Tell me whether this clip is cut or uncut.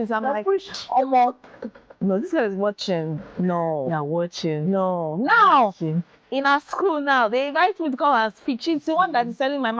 uncut